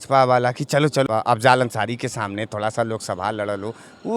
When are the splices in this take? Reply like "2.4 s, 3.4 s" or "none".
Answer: 1.1 s

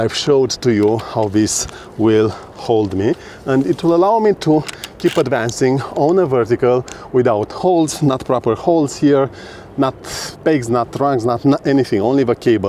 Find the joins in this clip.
none

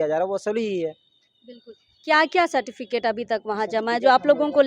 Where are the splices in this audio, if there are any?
none

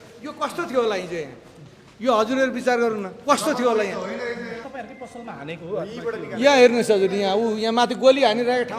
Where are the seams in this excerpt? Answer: 4.7 s

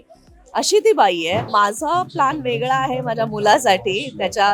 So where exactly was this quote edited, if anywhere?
1.4 s

